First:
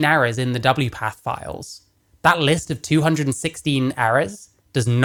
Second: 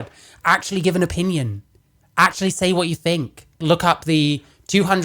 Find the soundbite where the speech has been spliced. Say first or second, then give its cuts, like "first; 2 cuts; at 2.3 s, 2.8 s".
second; 1 cut; at 3.6 s